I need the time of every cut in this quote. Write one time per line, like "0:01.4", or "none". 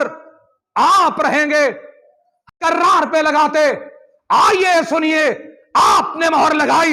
0:02.6